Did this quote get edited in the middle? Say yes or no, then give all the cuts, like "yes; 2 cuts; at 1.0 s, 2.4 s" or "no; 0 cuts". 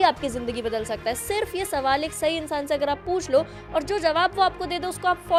no; 0 cuts